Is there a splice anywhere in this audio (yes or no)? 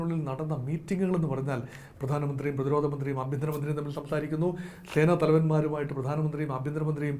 no